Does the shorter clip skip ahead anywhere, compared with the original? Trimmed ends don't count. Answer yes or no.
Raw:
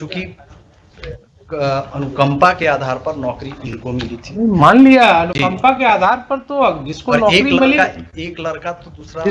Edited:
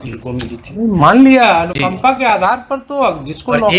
no